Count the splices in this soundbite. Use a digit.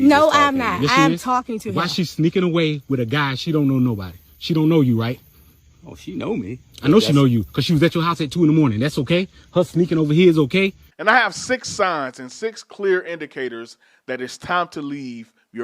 1